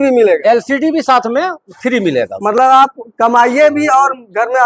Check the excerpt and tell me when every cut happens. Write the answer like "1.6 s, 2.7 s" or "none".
none

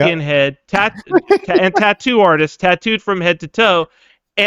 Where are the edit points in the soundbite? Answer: none

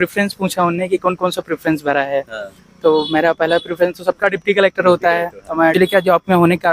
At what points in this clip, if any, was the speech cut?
5.7 s

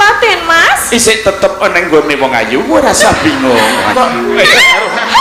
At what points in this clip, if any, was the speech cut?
3.9 s

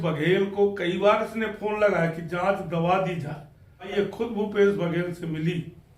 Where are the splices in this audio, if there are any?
3.9 s

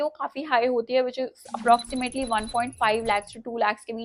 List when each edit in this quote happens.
none

